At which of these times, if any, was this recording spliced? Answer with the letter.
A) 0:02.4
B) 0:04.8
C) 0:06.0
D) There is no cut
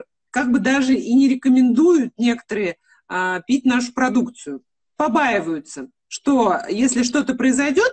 D